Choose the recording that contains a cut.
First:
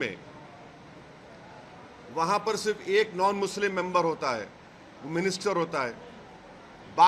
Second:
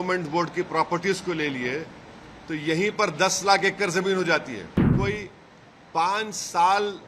second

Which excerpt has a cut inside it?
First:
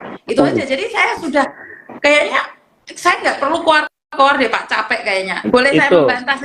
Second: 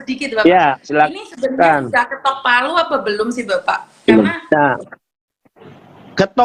first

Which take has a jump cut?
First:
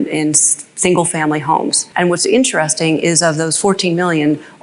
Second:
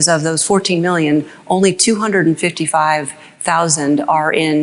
first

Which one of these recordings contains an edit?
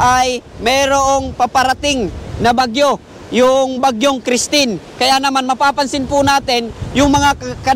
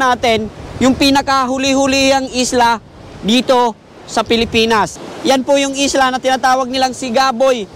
second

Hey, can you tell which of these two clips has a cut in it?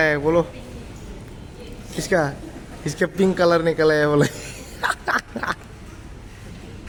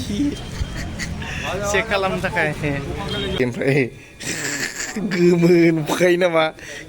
second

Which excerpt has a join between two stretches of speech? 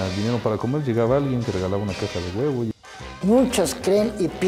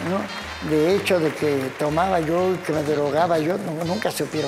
first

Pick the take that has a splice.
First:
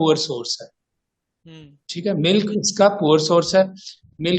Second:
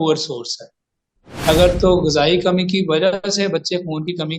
second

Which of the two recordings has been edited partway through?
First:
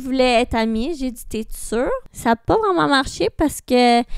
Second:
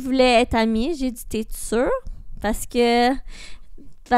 first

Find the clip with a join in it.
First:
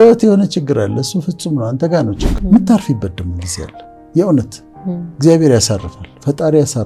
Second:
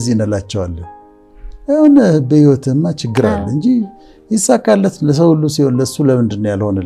first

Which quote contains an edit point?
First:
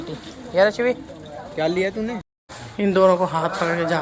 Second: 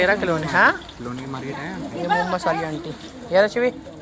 first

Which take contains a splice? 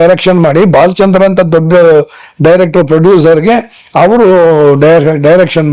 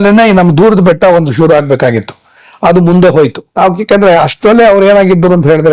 second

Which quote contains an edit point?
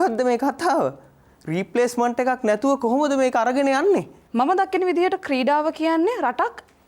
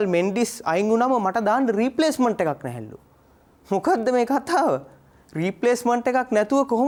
first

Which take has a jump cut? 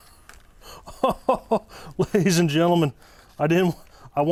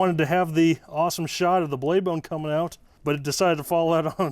second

